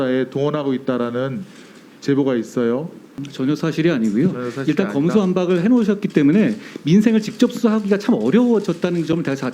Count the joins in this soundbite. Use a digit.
1